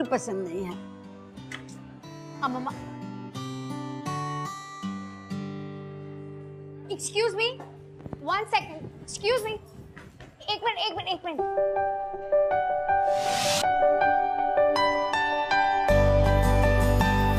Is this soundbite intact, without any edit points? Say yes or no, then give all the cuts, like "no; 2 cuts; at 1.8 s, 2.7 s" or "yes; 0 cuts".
yes; 0 cuts